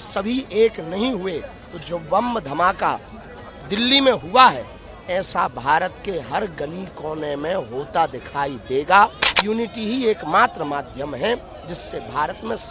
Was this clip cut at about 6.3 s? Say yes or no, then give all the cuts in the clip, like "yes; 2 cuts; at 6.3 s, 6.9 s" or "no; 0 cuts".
no; 1 cut; at 9.3 s